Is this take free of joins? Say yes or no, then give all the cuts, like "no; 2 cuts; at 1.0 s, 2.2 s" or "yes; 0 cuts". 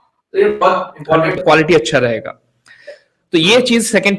no; 1 cut; at 1.4 s